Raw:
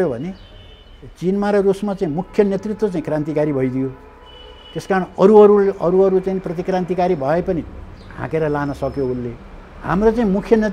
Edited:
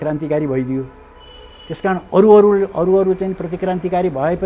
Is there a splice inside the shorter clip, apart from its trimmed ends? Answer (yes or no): no